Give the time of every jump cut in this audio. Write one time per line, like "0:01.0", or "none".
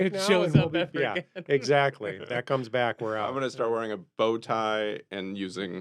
none